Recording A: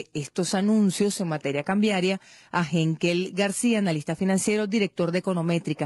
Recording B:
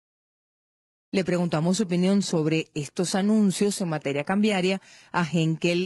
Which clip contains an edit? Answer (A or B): A